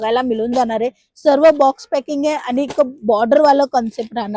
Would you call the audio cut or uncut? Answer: uncut